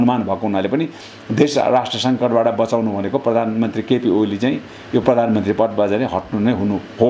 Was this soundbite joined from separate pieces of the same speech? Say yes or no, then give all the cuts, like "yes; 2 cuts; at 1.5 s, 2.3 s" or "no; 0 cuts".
no; 0 cuts